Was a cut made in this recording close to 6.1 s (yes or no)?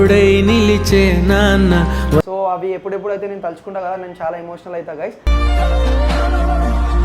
no